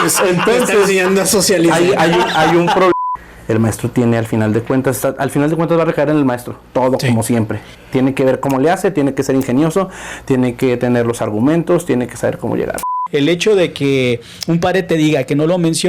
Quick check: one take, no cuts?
no; 2 cuts; at 2.9 s, 12.9 s

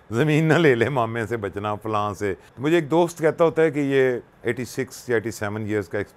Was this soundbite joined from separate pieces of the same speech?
yes; 2 cuts; at 2.5 s, 4.3 s

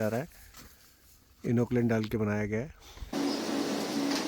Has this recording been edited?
yes; 1 cut; at 3.1 s

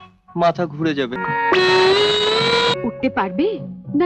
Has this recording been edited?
yes; 1 cut; at 2.7 s

